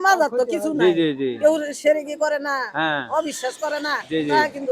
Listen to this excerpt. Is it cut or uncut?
uncut